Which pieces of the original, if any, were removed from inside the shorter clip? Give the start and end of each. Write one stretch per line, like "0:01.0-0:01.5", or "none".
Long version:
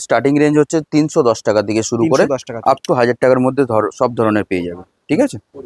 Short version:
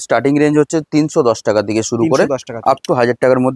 none